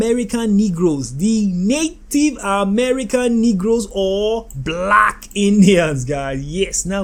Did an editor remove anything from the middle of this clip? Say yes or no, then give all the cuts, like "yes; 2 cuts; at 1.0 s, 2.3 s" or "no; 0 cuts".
no; 0 cuts